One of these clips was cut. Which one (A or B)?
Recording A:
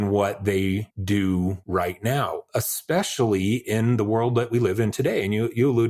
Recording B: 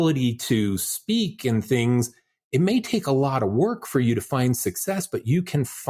A